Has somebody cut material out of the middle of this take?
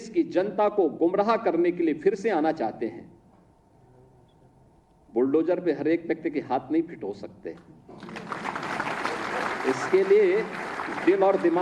yes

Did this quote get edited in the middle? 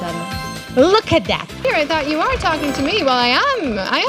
yes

